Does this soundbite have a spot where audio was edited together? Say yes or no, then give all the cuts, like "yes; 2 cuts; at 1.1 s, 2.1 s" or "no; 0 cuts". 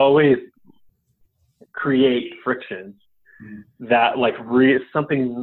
no; 0 cuts